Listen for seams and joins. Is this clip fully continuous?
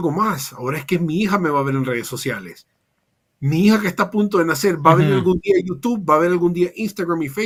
yes; 0 cuts

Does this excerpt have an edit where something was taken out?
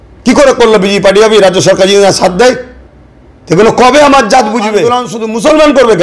yes; 1 cut; at 5.0 s

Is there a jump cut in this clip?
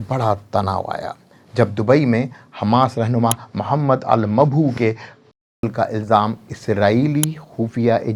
no; 0 cuts

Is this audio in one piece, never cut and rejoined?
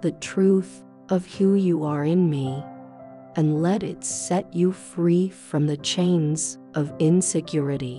yes; 0 cuts

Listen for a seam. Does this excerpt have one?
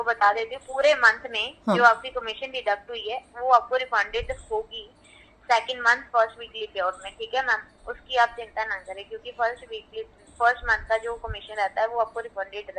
no; 0 cuts

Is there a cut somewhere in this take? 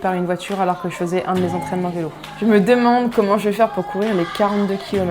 yes; 1 cut; at 2.2 s

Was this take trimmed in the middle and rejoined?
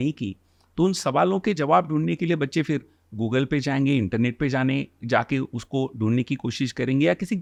no; 0 cuts

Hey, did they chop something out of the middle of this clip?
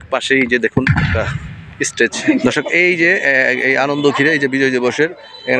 yes; 1 cut; at 2.2 s

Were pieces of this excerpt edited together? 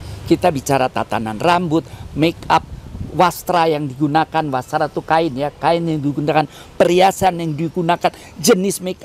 no; 0 cuts

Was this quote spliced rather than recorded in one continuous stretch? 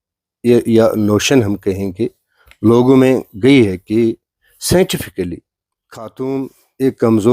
yes; 1 cut; at 6.1 s

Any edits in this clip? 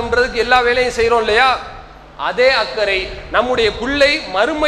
no; 0 cuts

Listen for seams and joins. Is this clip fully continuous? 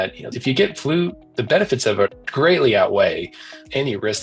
no; 1 cut; at 2.2 s

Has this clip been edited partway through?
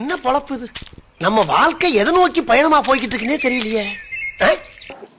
no; 0 cuts

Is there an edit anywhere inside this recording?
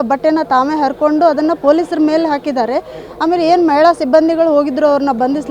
no; 0 cuts

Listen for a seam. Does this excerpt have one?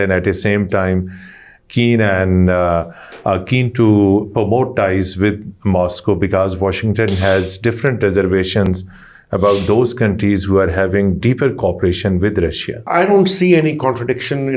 yes; 1 cut; at 12.9 s

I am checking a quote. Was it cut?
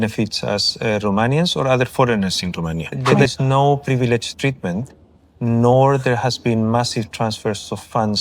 yes; 1 cut; at 3.3 s

